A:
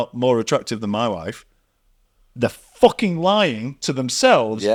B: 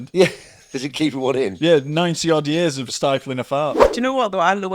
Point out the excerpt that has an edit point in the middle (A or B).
B